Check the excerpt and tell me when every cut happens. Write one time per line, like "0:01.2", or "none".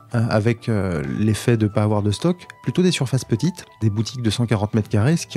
0:03.8